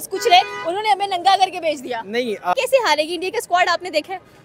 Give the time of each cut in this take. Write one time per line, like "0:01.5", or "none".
0:02.5